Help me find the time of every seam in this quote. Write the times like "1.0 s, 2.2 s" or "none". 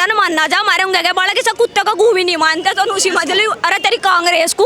none